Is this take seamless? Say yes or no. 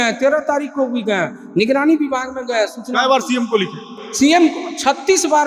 yes